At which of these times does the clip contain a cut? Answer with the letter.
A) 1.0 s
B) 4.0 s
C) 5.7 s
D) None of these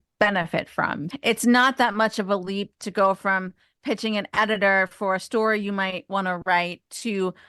A